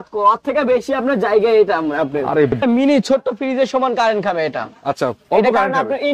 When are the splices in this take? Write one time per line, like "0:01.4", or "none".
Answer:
0:02.6